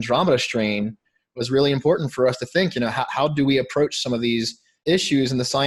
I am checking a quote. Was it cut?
no; 0 cuts

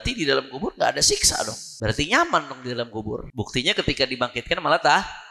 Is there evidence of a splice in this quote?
yes; 2 cuts; at 1.6 s, 3.3 s

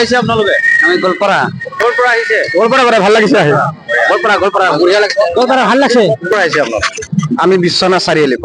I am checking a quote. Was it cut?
yes; 2 cuts; at 1.7 s, 6.3 s

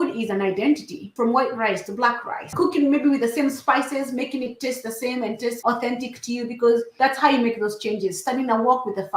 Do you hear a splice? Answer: yes; 4 cuts; at 1.0 s, 2.5 s, 5.6 s, 6.9 s

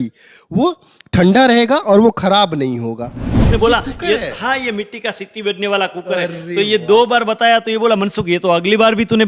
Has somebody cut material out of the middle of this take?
yes; 1 cut; at 3.4 s

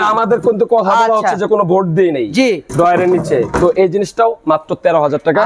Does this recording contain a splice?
no; 0 cuts

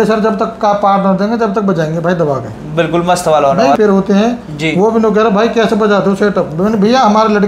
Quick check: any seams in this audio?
yes; 1 cut; at 3.8 s

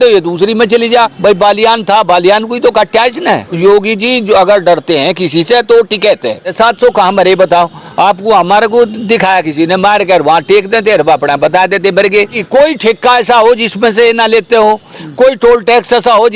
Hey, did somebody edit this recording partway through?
yes; 4 cuts; at 1.1 s, 3.6 s, 6.5 s, 12.4 s

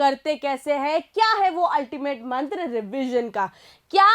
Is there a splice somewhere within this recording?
no; 0 cuts

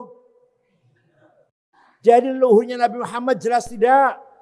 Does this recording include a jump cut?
yes; 1 cut; at 1.5 s

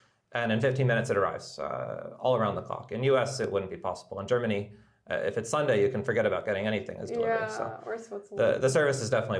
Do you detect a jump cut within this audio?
no; 0 cuts

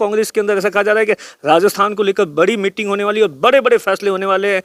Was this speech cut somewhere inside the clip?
no; 0 cuts

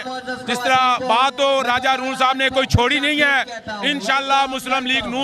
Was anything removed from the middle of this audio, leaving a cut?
no; 0 cuts

